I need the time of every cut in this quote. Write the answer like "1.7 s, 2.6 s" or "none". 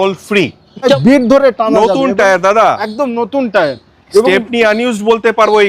1.0 s